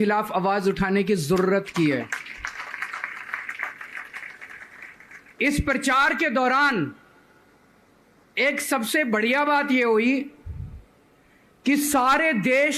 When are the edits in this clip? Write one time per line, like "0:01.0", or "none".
none

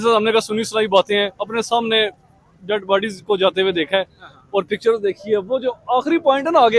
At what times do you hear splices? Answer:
none

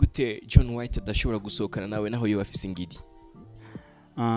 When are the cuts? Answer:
none

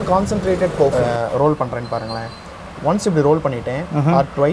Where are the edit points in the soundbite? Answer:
0:00.9

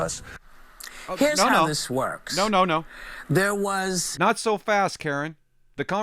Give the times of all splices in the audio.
0:04.1

